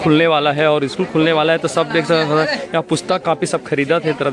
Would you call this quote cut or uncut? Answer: uncut